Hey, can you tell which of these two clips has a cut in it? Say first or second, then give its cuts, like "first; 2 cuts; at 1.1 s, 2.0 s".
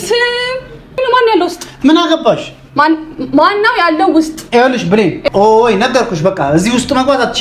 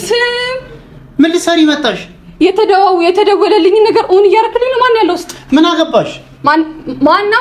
first; 2 cuts; at 1.0 s, 5.2 s